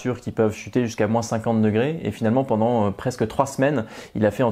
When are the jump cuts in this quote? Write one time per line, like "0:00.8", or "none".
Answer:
none